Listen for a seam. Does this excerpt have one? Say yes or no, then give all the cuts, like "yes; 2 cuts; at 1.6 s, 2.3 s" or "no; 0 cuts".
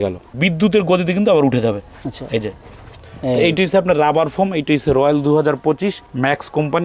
no; 0 cuts